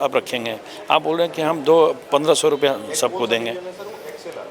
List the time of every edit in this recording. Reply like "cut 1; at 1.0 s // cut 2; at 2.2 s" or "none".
none